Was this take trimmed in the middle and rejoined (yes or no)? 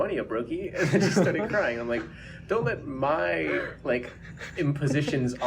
no